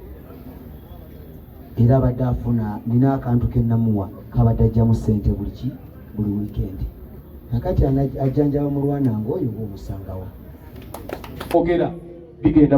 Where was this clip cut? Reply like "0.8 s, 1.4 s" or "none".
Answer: 11.5 s